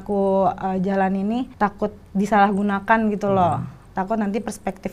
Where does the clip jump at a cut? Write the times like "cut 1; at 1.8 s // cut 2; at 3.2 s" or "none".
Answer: cut 1; at 1.5 s